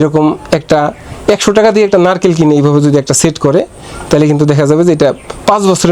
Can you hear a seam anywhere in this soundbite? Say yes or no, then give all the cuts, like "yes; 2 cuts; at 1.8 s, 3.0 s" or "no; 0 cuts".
no; 0 cuts